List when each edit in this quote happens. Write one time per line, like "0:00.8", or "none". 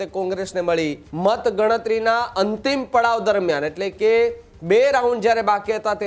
0:01.0